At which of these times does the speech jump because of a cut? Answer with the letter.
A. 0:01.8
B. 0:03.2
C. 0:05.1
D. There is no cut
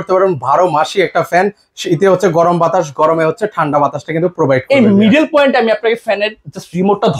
D